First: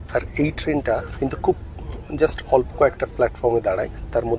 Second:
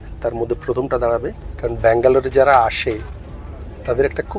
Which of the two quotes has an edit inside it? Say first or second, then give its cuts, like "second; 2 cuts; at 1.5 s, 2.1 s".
second; 1 cut; at 1.4 s